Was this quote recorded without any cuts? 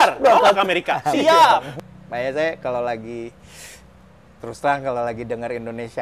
no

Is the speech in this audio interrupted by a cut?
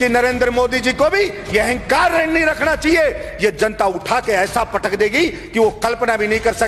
no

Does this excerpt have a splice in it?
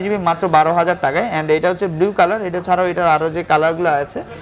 no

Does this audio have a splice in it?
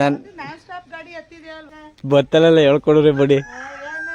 yes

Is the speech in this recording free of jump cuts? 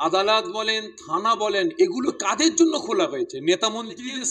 yes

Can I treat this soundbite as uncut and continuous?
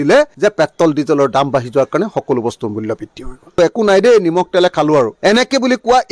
no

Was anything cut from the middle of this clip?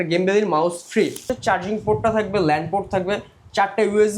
yes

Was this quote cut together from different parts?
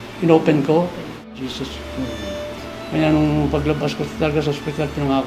yes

